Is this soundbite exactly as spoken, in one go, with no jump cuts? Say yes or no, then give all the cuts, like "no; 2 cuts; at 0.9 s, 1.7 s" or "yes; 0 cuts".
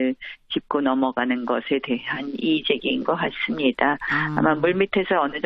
no; 1 cut; at 1.1 s